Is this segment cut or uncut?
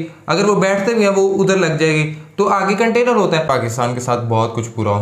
cut